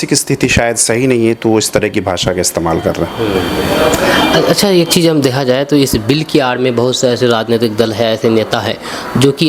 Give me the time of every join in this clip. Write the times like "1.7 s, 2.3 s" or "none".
none